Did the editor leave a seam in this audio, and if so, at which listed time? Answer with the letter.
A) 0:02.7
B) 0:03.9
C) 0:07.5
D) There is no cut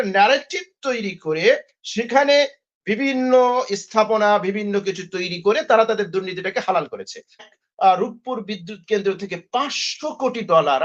C